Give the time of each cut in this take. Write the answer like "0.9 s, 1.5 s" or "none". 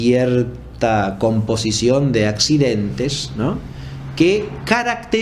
none